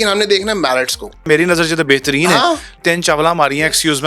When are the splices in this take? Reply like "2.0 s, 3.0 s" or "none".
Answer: 1.2 s, 2.8 s